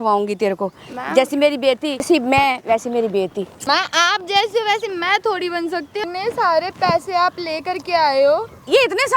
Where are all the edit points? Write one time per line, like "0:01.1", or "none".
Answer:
0:02.0
0:03.5
0:06.0